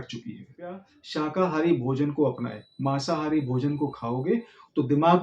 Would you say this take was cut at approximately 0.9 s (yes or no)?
yes